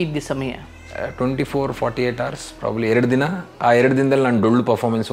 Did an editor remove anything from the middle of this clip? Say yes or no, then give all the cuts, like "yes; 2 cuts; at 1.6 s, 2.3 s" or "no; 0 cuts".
no; 0 cuts